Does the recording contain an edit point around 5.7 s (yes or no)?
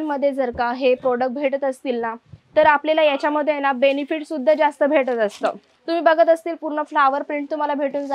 yes